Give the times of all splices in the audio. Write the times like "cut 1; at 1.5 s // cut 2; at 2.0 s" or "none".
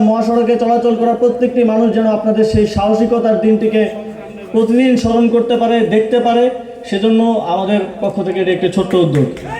none